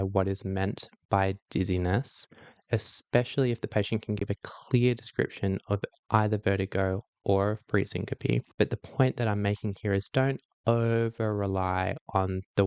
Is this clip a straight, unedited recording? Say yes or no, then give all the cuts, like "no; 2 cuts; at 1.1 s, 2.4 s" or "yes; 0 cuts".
no; 1 cut; at 8.5 s